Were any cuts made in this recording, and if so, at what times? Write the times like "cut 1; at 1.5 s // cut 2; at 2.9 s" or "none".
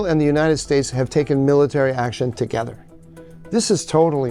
none